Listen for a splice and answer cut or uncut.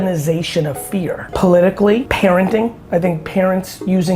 cut